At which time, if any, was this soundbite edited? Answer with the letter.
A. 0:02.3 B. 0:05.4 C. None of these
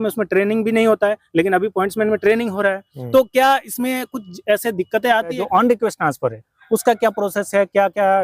B